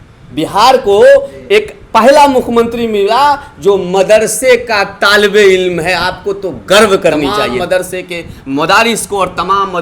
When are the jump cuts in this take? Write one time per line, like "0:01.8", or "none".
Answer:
0:07.5

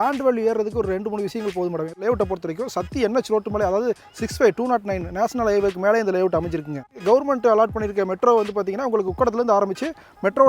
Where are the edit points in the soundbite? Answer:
0:02.0
0:06.9

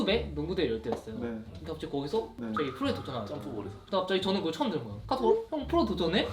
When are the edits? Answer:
0:02.4
0:03.8

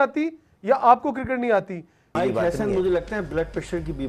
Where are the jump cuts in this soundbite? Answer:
0:02.1

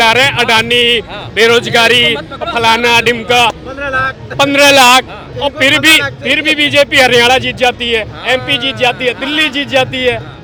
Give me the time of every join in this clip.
none

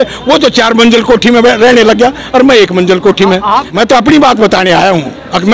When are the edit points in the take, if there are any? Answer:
0:03.7

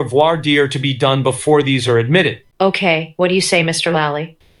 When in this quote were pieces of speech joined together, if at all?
none

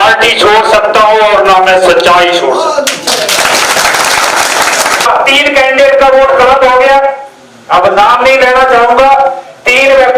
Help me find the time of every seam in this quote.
0:05.1

